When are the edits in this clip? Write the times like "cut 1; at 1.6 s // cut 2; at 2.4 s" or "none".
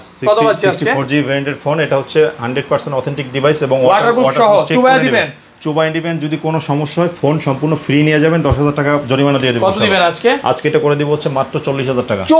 none